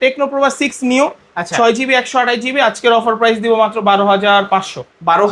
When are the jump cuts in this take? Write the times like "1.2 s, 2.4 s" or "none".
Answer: none

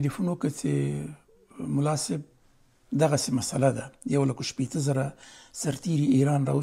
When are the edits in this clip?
none

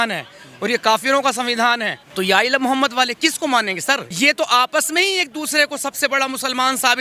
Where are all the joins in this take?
2.0 s, 4.1 s

